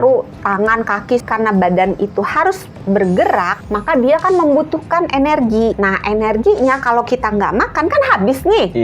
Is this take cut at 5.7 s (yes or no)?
yes